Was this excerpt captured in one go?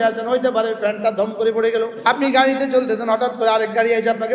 no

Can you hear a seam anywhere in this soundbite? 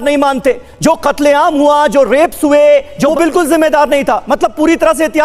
yes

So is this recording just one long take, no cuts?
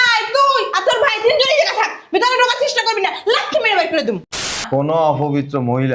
no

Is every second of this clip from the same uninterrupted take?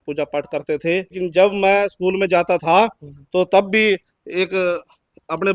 no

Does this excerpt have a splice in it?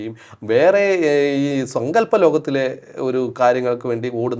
no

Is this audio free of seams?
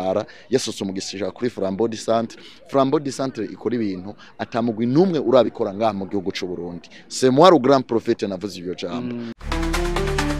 no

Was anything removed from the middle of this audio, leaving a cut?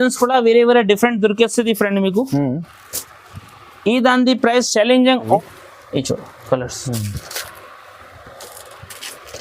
yes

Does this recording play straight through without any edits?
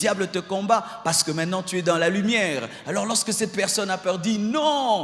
yes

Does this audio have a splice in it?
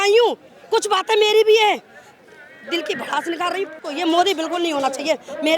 yes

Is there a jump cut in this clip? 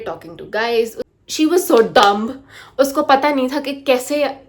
yes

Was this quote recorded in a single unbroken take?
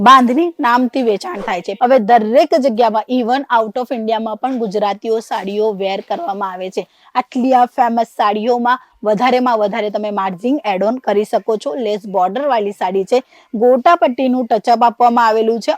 yes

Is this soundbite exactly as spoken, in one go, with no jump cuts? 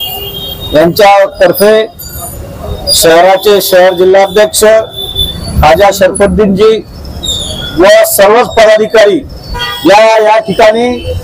no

